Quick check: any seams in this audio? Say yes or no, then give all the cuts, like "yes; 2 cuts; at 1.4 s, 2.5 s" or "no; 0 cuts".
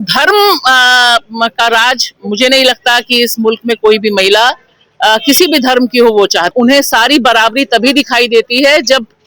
yes; 1 cut; at 6.5 s